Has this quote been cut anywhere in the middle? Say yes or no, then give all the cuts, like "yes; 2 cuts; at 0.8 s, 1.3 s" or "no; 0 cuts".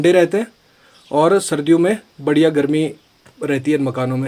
no; 0 cuts